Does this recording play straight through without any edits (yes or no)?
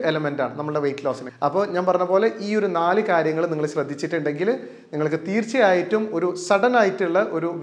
no